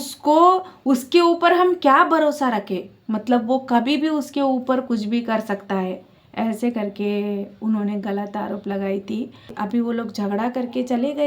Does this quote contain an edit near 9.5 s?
yes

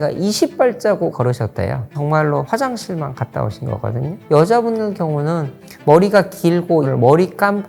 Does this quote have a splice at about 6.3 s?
no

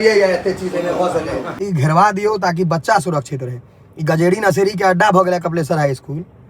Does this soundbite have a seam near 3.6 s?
no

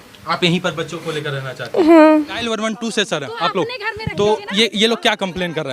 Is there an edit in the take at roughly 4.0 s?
no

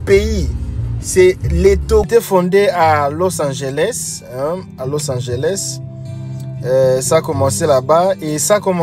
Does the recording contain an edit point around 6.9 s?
no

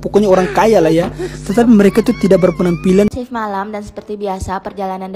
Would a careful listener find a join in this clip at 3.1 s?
yes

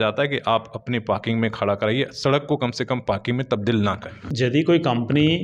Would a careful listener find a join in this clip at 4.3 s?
yes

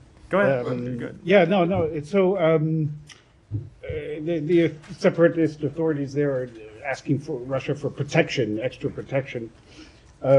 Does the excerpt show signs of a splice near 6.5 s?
yes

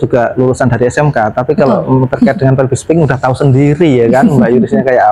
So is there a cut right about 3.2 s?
no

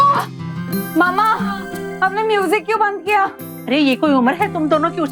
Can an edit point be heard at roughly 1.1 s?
no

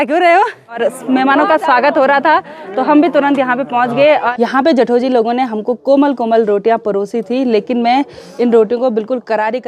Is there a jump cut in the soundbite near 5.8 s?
no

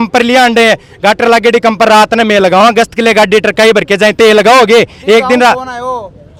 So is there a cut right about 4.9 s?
no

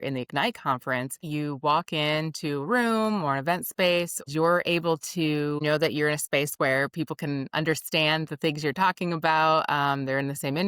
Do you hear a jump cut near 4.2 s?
yes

